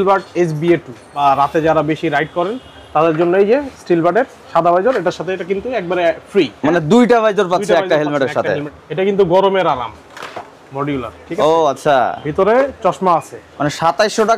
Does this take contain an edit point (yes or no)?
yes